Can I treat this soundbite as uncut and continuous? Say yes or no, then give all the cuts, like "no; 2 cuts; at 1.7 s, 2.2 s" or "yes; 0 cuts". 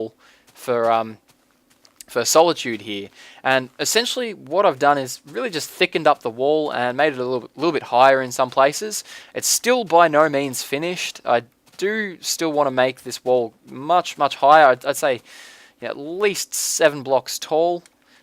no; 1 cut; at 10.2 s